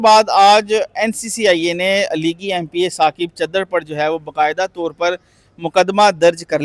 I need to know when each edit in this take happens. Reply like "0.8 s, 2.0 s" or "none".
none